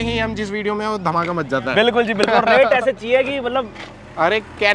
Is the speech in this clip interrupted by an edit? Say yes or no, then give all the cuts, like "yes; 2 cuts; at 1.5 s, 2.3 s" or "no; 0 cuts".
no; 0 cuts